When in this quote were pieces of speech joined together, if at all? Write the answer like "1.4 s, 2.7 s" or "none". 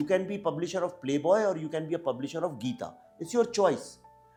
none